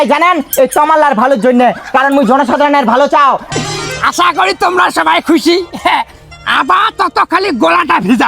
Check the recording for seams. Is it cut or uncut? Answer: cut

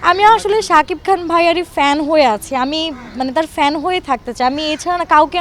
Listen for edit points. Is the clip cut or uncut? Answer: uncut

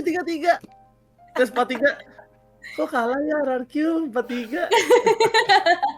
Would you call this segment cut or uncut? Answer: uncut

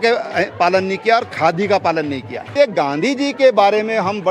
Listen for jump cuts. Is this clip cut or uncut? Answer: cut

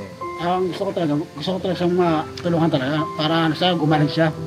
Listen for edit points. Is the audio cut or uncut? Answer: uncut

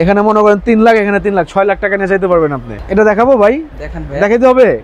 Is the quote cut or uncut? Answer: cut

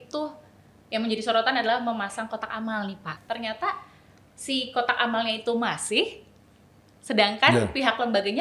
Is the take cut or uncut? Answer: cut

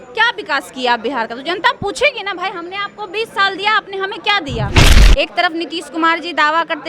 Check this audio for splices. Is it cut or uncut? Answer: cut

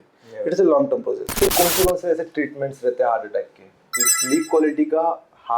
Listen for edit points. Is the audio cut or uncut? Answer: cut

